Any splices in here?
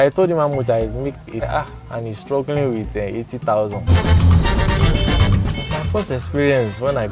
yes; 2 cuts; at 1.4 s, 3.9 s

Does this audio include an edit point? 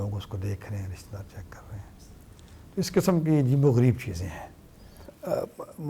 no; 0 cuts

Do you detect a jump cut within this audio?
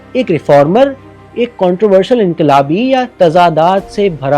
yes; 1 cut; at 3.1 s

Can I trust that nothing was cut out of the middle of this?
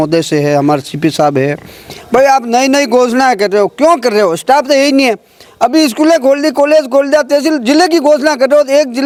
yes; 0 cuts

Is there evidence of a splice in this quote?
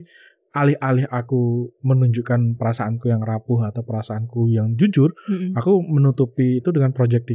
no; 0 cuts

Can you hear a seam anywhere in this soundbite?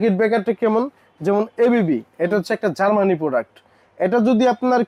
no; 0 cuts

